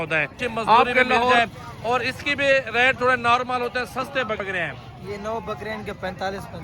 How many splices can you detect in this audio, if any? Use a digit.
2